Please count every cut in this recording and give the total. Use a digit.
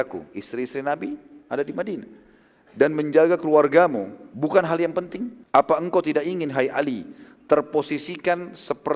2